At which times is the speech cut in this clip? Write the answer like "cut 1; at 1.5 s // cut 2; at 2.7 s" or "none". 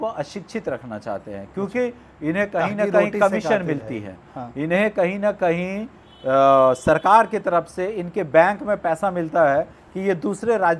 none

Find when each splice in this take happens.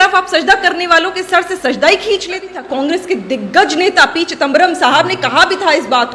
cut 1; at 2.6 s

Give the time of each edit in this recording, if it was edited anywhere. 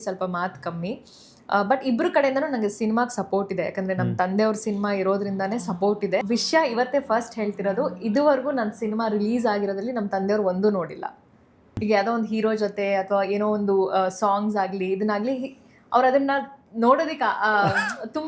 cut 1; at 6.2 s // cut 2; at 11.8 s

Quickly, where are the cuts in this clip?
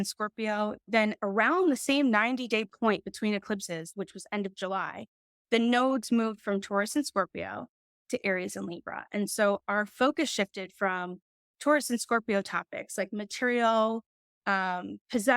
cut 1; at 3.9 s

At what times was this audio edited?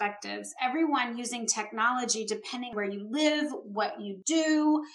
none

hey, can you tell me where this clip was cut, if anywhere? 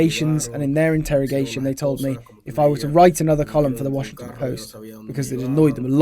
none

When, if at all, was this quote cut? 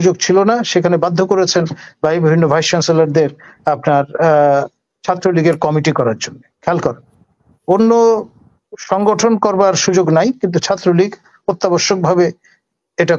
none

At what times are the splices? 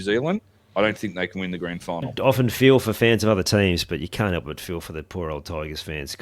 cut 1; at 2.1 s

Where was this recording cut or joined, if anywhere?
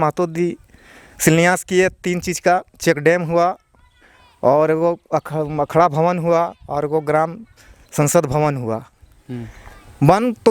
none

